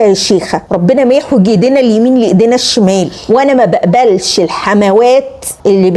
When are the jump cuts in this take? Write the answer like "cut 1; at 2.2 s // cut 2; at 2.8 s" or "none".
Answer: cut 1; at 3.1 s